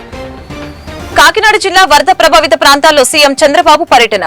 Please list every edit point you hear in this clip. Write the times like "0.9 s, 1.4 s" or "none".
1.0 s